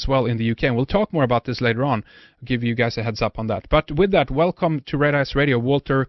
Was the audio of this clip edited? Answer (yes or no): no